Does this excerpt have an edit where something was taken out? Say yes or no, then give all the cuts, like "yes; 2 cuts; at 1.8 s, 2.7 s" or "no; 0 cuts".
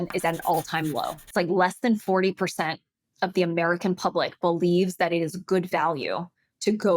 yes; 1 cut; at 1.2 s